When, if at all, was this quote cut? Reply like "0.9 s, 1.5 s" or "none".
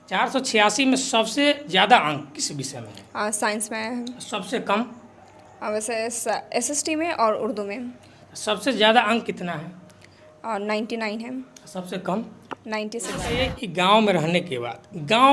13.2 s

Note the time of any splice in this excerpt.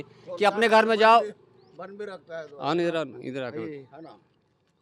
none

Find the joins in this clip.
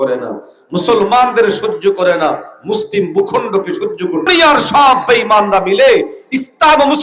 4.3 s

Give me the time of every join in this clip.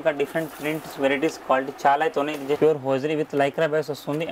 2.6 s

